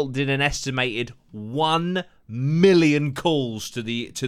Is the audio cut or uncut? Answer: uncut